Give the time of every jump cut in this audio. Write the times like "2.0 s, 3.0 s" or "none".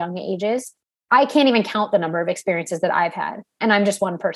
0.9 s